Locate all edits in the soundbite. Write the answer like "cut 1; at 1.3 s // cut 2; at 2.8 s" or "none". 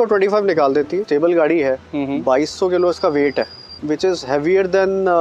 cut 1; at 1.0 s // cut 2; at 3.7 s